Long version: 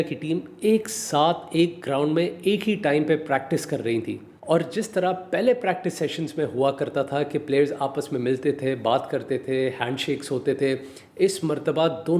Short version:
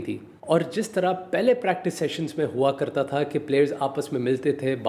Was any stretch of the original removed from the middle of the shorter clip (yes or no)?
no